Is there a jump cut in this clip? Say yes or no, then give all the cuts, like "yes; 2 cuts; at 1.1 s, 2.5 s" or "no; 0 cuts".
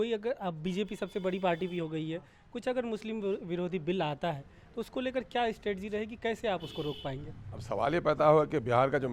no; 0 cuts